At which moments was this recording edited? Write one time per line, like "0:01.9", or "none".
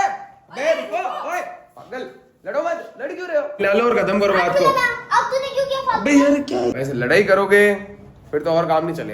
0:03.6
0:06.7

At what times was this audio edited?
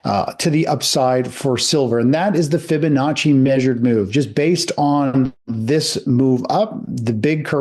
none

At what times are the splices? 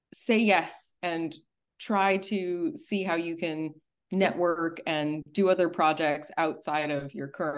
none

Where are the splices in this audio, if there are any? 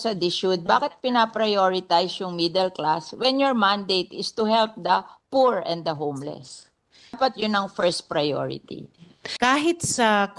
0:07.2
0:09.2

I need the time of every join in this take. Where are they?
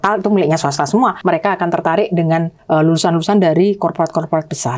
0:01.2
0:02.6

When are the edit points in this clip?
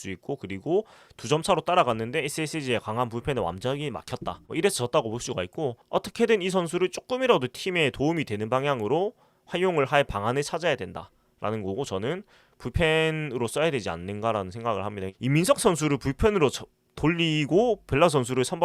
0:05.8

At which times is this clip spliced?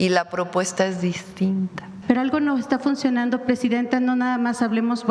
0:02.0

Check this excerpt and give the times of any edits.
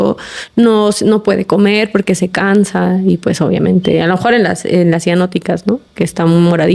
none

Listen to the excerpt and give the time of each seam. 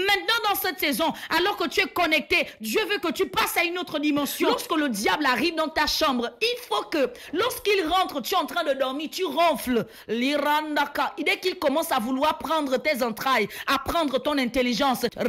0:04.4

